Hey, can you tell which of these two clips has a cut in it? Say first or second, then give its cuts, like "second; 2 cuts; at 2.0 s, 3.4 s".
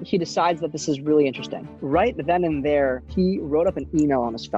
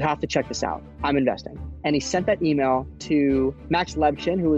second; 1 cut; at 3.6 s